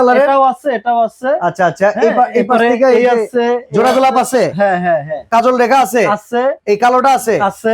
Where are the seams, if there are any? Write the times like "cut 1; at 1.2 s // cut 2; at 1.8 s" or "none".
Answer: cut 1; at 5.2 s // cut 2; at 6.6 s